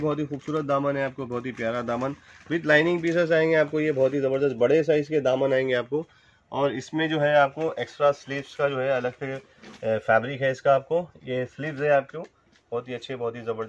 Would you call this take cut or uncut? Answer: uncut